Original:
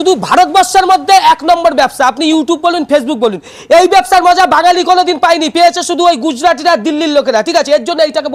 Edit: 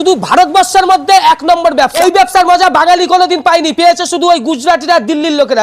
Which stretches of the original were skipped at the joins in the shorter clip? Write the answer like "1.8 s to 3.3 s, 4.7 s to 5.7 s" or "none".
2.0 s to 3.8 s